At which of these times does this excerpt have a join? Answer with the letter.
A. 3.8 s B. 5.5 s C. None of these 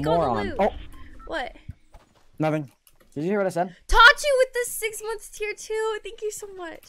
C